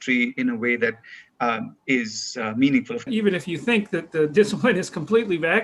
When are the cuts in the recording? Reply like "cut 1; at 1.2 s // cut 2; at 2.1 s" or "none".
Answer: cut 1; at 3.1 s

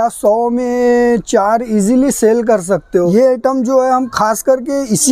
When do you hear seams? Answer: cut 1; at 3.1 s

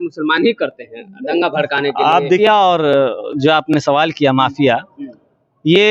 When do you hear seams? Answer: cut 1; at 2.4 s

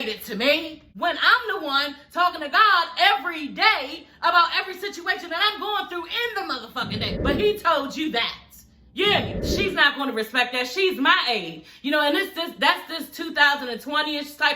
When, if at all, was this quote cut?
cut 1; at 9.4 s

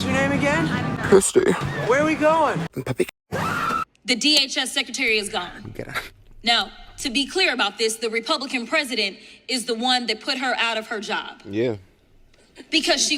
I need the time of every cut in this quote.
none

